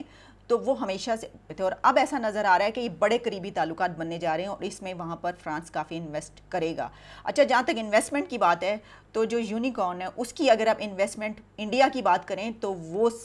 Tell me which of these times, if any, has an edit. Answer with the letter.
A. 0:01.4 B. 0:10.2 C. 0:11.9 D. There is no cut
A